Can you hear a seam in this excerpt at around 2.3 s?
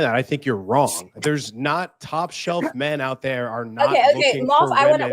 no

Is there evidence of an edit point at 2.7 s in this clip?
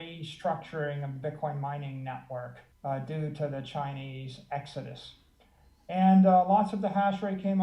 yes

